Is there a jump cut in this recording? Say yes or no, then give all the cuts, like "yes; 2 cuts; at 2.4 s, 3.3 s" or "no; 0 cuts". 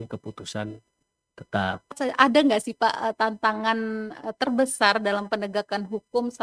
yes; 1 cut; at 2.0 s